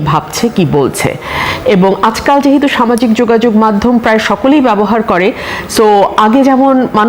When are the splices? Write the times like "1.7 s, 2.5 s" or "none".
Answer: none